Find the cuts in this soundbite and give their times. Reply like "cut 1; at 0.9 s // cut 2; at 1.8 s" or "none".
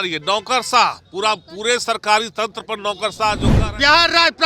cut 1; at 3.5 s